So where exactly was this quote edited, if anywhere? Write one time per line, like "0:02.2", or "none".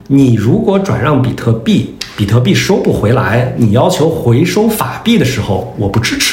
none